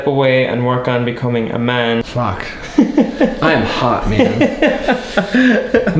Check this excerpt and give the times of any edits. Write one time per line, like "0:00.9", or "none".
0:02.1